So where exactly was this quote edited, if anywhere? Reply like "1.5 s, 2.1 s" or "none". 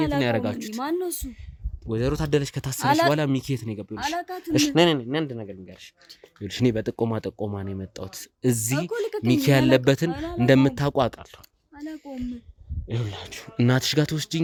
none